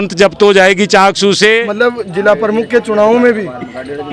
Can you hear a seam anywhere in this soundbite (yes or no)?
yes